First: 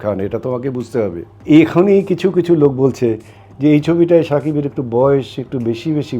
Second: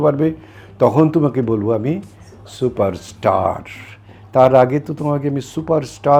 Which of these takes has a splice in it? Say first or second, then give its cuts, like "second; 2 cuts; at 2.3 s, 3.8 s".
first; 1 cut; at 1.3 s